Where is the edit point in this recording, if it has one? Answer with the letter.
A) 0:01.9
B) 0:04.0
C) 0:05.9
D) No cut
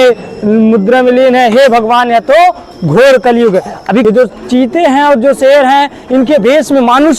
B